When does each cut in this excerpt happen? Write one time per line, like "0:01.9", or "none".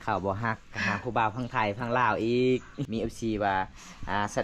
0:02.8